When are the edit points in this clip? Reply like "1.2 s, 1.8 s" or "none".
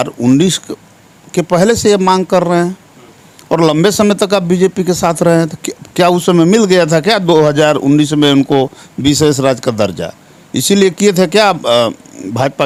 none